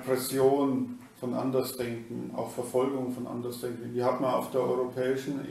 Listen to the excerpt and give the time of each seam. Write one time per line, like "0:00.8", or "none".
none